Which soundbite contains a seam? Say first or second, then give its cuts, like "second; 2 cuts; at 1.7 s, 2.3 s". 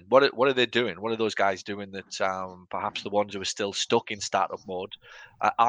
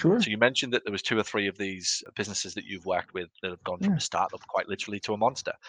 second; 1 cut; at 2.0 s